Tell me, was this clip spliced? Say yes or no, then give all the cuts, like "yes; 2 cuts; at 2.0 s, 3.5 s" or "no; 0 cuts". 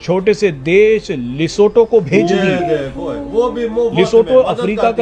no; 0 cuts